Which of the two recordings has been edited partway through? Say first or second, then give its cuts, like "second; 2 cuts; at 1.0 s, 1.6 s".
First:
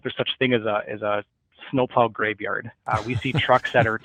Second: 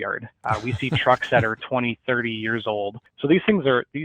second; 1 cut; at 3.0 s